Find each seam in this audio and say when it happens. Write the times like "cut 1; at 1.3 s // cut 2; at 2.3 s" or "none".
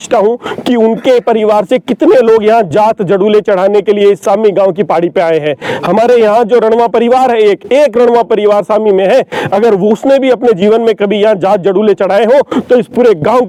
none